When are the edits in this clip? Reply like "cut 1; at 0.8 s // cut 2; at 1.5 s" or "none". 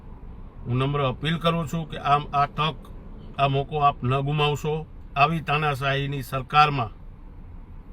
cut 1; at 5.0 s